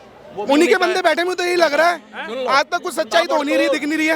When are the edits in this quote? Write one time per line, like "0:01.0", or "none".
none